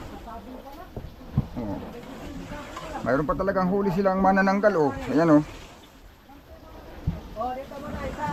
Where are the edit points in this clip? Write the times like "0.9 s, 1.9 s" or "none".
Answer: none